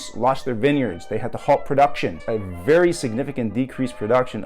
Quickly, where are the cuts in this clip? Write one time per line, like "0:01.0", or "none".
0:02.2